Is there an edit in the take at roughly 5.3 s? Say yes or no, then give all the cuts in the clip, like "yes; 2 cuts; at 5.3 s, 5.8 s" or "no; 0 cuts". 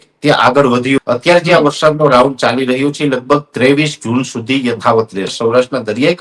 yes; 2 cuts; at 1.0 s, 5.3 s